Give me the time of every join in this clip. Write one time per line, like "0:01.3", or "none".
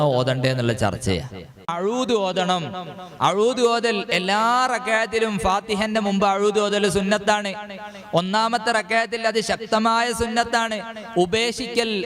0:01.7